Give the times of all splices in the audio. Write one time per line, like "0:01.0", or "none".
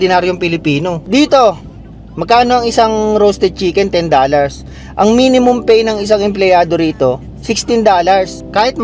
0:01.0